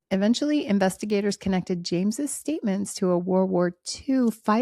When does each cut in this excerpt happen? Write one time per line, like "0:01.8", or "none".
none